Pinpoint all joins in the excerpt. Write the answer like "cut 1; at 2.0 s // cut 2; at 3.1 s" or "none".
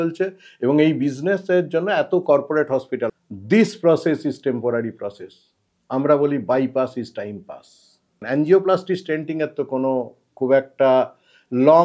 cut 1; at 3.1 s // cut 2; at 8.2 s